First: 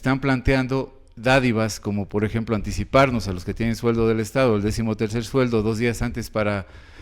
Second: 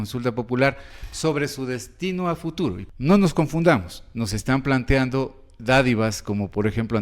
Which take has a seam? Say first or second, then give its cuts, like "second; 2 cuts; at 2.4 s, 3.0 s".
second; 1 cut; at 2.8 s